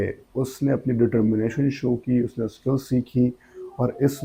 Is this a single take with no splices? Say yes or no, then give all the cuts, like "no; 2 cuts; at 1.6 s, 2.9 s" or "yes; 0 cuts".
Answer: yes; 0 cuts